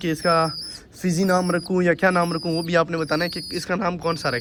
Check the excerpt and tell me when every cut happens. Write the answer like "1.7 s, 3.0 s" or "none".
none